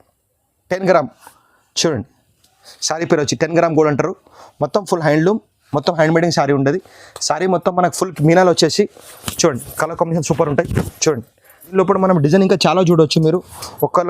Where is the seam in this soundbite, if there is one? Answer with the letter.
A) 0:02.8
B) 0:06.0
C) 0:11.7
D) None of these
C